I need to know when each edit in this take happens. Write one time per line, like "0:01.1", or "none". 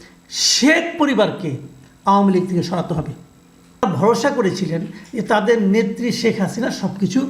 0:03.8